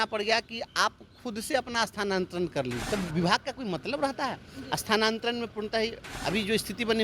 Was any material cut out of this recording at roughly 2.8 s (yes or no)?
yes